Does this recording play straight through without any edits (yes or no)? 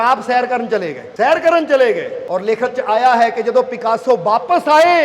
no